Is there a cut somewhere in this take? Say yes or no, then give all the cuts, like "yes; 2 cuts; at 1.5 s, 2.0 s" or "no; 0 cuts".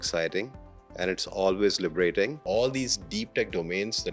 yes; 1 cut; at 2.4 s